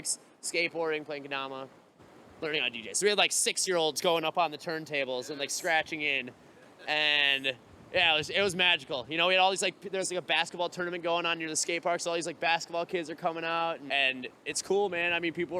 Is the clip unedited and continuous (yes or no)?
no